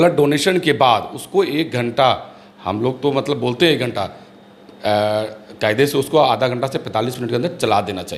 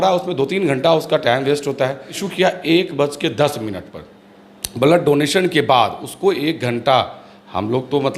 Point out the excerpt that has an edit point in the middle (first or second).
second